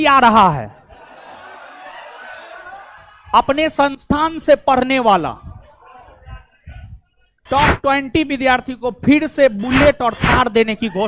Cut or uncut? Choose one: uncut